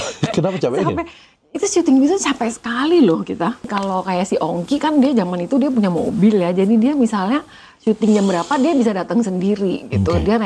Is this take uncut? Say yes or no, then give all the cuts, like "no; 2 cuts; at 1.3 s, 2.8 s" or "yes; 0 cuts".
no; 1 cut; at 3.7 s